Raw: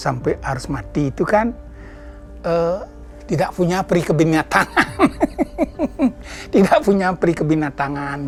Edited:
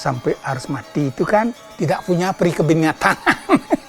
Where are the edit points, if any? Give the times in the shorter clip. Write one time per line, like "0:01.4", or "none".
0:01.6